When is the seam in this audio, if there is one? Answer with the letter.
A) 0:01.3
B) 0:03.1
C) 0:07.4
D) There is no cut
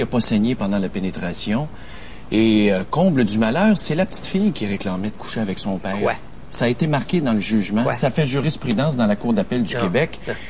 C